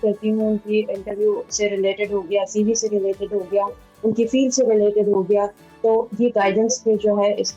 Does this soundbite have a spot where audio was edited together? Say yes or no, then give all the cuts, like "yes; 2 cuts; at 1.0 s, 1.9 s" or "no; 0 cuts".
no; 0 cuts